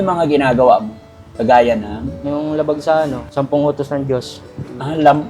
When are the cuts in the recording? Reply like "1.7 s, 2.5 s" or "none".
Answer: 2.1 s, 3.2 s